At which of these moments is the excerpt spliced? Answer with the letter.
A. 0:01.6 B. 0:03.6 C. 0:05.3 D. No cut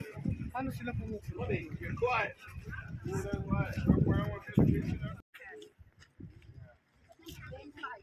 D